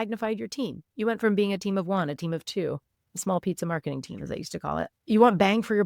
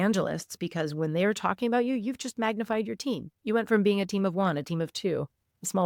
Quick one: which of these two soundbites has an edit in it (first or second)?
first